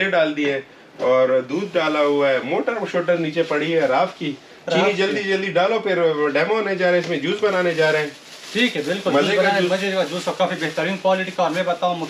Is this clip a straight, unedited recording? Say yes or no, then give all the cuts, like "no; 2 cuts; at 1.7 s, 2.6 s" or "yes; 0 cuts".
yes; 0 cuts